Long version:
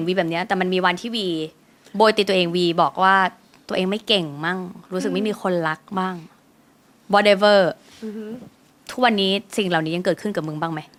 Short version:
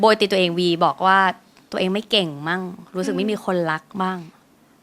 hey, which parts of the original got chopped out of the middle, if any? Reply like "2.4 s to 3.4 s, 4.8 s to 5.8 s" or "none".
none